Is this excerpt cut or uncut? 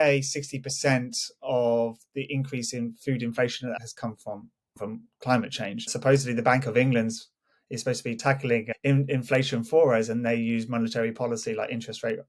cut